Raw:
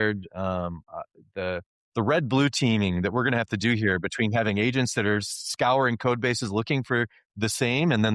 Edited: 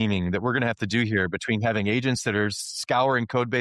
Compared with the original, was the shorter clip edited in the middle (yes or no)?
no